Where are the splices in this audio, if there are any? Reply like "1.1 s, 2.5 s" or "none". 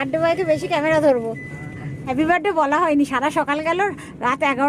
2.1 s